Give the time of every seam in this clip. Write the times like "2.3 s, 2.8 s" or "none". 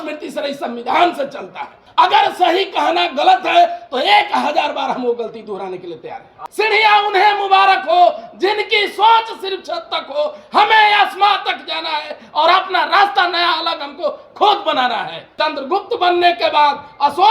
1.8 s, 6.3 s, 15.2 s